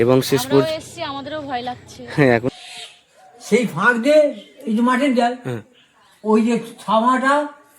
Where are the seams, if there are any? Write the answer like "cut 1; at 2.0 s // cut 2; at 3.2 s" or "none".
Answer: cut 1; at 2.5 s